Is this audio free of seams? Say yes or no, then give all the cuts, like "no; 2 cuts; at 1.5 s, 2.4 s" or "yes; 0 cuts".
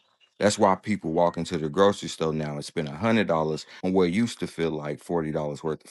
yes; 0 cuts